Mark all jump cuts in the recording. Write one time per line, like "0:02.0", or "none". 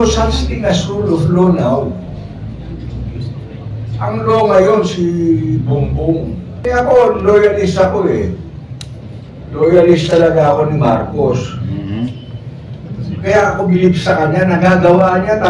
0:06.6